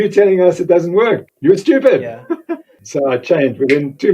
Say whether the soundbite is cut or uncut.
cut